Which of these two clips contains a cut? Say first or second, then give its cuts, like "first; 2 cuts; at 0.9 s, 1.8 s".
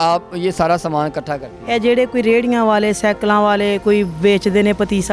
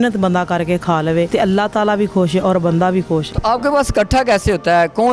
second; 2 cuts; at 1.3 s, 3.3 s